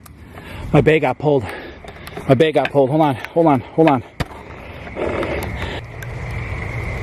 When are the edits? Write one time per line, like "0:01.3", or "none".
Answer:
none